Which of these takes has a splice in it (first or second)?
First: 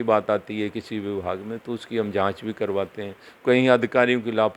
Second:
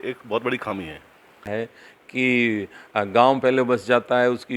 second